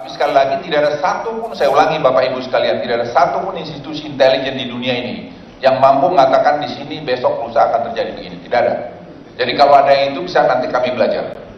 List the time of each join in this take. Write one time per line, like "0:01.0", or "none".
0:06.5